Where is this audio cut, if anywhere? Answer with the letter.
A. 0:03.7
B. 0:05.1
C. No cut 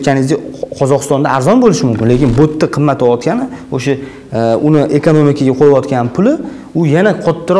C